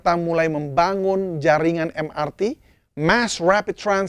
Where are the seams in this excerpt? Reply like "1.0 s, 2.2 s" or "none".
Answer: none

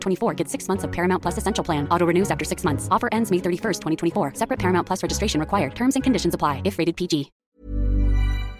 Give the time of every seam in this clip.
7.4 s

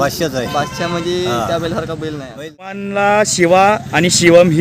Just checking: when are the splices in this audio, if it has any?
2.8 s

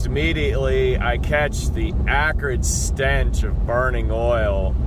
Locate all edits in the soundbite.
none

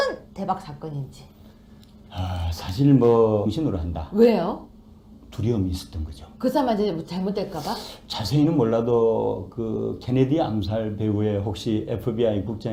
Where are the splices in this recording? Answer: none

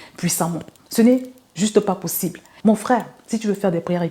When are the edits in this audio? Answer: 2.5 s

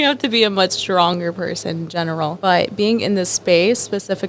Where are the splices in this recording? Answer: 2.4 s

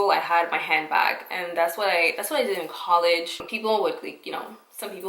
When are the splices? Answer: 3.4 s

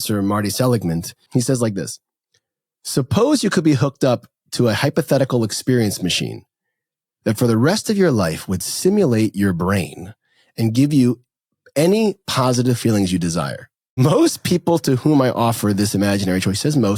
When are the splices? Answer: 1.1 s, 14.0 s

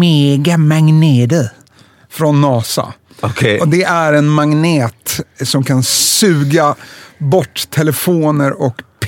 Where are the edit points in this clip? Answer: none

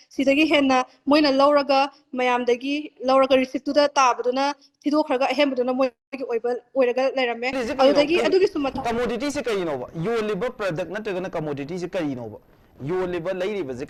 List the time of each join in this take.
none

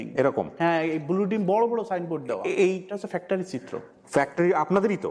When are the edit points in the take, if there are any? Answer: 2.9 s

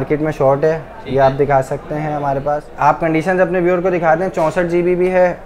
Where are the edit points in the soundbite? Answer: 2.7 s

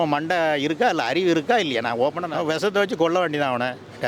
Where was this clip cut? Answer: 2.3 s

